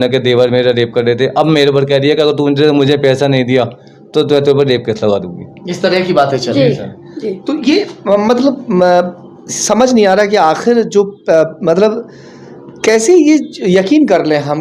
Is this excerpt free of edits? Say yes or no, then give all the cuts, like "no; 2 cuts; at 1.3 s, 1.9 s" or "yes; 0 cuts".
yes; 0 cuts